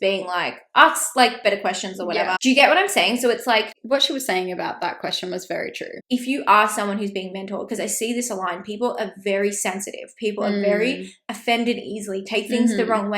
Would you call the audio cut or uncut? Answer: cut